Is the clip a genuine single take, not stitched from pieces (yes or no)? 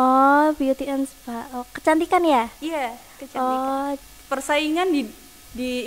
no